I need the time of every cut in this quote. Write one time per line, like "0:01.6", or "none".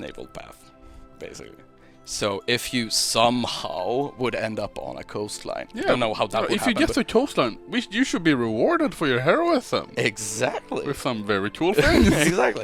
none